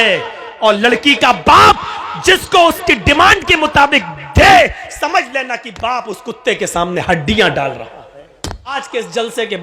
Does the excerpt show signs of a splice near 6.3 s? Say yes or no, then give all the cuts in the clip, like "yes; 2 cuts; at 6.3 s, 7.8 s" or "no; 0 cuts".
no; 1 cut; at 8.7 s